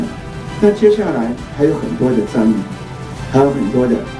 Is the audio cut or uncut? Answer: uncut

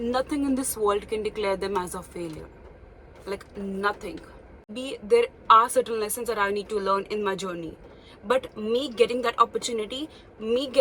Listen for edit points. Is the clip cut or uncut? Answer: cut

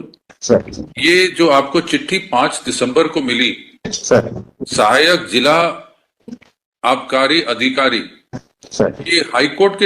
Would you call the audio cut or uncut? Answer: uncut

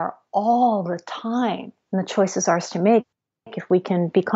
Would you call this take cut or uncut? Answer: cut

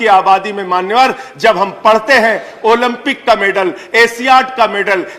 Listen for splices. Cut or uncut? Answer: uncut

